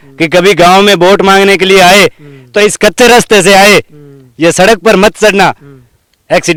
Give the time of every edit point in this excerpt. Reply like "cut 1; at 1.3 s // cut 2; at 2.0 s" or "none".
none